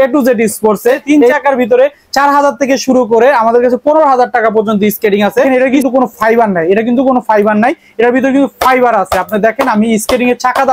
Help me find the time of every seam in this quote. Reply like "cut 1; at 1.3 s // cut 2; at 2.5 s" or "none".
cut 1; at 1.0 s // cut 2; at 5.5 s